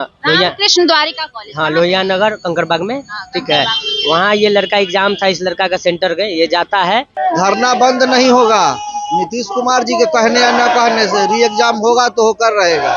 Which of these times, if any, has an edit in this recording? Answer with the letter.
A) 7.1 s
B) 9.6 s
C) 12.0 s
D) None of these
A